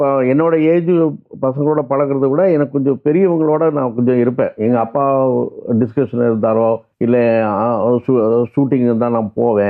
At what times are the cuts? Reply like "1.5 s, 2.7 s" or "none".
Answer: 6.9 s